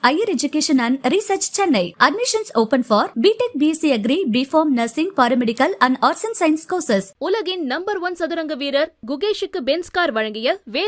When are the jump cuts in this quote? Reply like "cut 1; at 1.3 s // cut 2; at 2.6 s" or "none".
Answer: none